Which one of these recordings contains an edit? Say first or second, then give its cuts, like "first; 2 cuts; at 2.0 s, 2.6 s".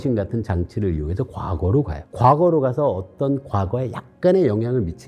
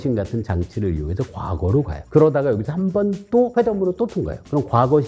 second; 2 cuts; at 2.0 s, 3.5 s